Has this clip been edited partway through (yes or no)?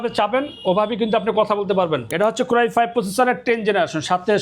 yes